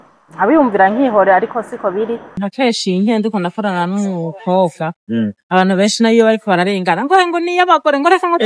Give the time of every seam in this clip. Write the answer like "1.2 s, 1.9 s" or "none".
2.4 s